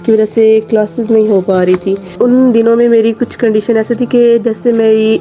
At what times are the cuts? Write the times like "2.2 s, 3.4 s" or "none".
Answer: 2.0 s